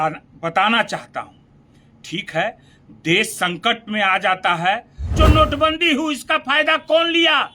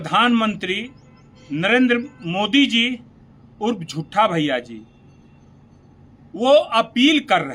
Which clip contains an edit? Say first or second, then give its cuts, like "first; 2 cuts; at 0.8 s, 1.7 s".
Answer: first; 1 cut; at 5.1 s